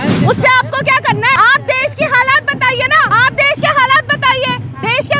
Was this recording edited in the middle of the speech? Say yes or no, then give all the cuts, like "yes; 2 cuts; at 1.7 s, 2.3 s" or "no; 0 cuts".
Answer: yes; 2 cuts; at 1.4 s, 3.1 s